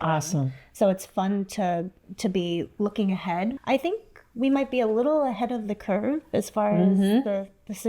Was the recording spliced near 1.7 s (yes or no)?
no